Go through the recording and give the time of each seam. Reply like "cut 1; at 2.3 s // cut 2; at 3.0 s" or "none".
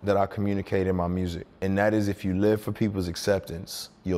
cut 1; at 1.5 s